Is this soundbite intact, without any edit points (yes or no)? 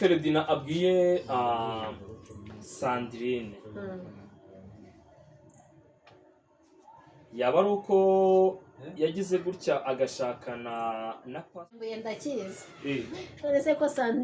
no